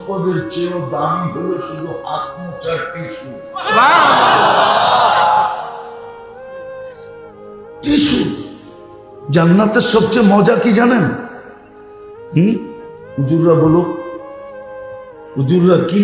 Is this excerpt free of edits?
yes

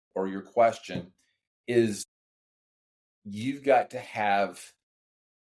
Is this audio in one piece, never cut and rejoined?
yes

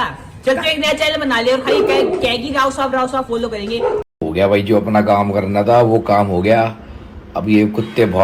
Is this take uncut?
no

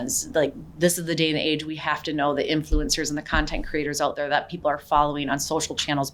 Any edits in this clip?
no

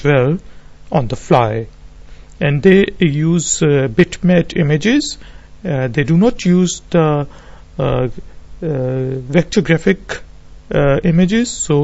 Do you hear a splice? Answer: no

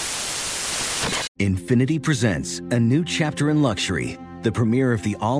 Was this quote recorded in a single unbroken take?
no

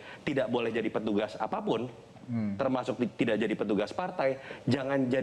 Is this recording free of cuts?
yes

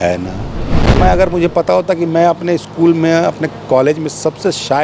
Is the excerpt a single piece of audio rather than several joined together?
no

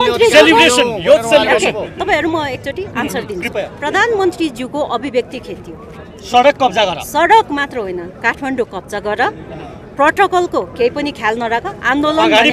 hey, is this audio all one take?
yes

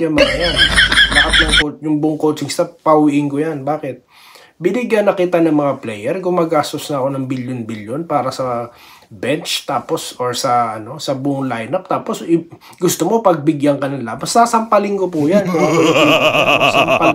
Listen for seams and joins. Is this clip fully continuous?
yes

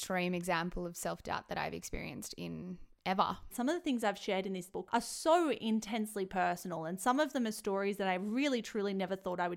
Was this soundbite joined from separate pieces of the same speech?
yes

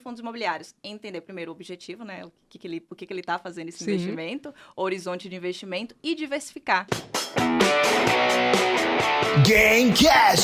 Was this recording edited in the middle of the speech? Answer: yes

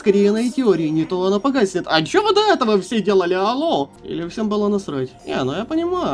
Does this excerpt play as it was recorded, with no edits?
no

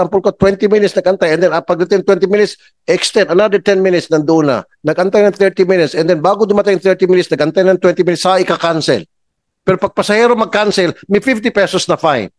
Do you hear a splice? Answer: no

